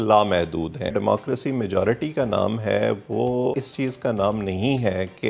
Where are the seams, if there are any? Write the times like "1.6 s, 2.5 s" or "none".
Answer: 0.9 s, 3.6 s